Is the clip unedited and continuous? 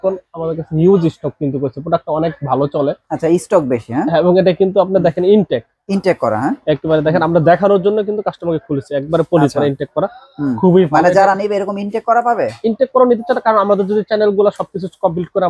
yes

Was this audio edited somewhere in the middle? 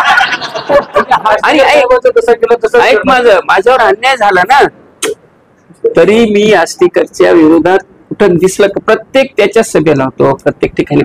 yes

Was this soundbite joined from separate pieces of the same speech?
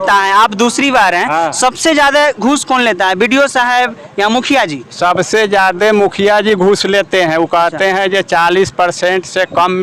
no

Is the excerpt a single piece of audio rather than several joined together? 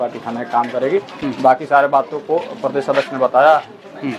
yes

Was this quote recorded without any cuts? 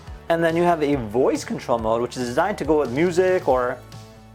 yes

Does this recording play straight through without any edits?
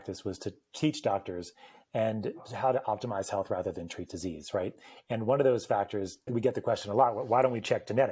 no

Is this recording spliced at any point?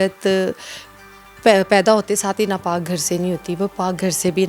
no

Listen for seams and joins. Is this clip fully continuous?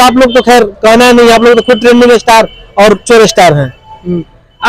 yes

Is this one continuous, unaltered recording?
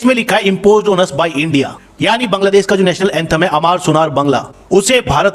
yes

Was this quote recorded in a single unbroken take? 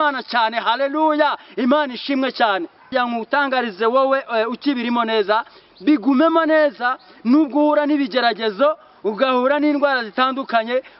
no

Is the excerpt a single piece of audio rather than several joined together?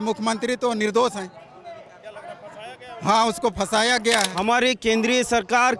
no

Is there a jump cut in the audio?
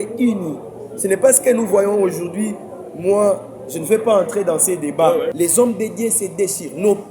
yes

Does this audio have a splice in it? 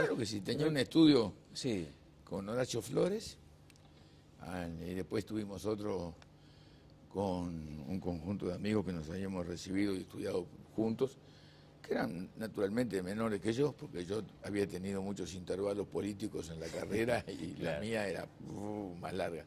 no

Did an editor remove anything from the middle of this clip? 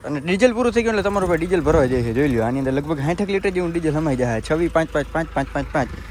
no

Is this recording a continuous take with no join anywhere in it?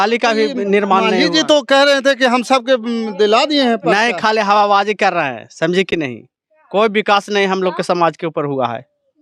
yes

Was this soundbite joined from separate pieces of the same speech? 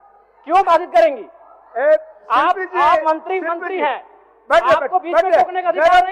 no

